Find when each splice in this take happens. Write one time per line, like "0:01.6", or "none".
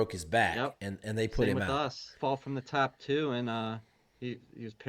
0:02.2